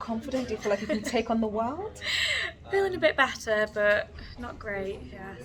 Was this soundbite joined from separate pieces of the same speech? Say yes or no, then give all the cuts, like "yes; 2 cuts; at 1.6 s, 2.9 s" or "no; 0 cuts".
no; 0 cuts